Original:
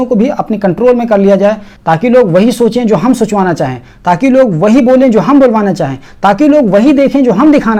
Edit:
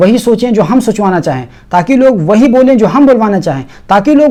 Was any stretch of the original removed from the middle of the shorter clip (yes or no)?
no